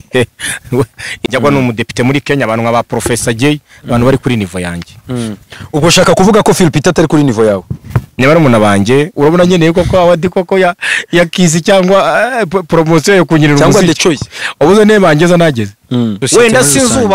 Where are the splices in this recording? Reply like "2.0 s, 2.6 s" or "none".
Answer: 1.0 s, 9.1 s, 16.2 s